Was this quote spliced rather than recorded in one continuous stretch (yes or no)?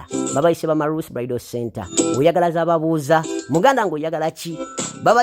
no